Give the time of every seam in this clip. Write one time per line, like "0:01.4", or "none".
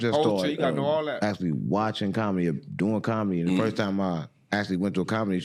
none